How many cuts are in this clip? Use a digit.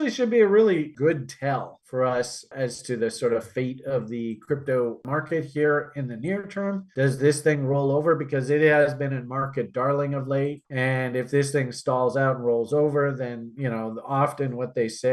3